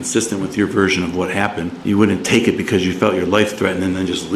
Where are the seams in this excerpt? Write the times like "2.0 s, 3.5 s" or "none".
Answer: 1.7 s